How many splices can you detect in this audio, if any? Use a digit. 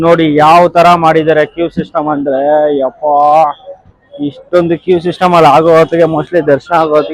0